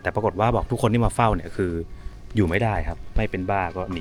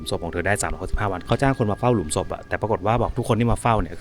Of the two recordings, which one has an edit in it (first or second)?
second